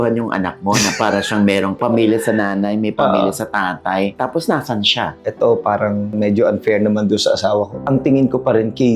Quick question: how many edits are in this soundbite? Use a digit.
2